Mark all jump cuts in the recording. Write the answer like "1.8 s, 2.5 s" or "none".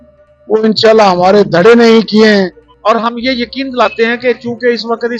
2.6 s